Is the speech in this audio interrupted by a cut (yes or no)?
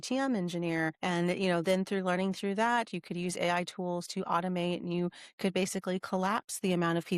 yes